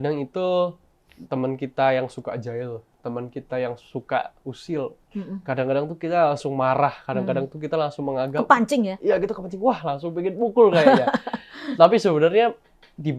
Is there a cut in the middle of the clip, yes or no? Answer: no